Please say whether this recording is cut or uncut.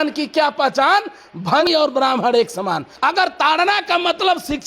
cut